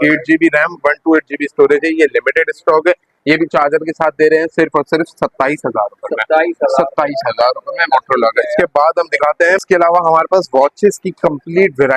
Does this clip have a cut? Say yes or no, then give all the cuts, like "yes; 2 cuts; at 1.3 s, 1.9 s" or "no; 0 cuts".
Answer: no; 0 cuts